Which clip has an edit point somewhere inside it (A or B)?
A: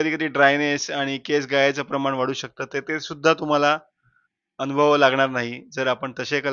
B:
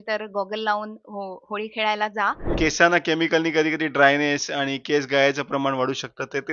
B